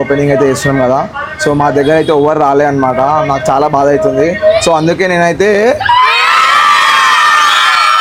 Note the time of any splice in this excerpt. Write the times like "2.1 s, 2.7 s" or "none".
none